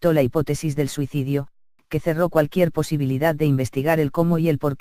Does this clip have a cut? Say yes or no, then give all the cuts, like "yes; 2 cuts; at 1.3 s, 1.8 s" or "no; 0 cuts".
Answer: no; 0 cuts